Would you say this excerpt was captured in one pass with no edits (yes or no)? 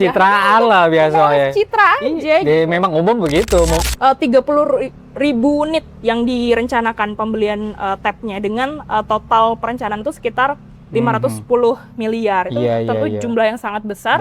no